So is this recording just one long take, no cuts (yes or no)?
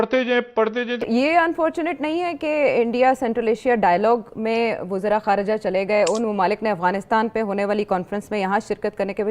no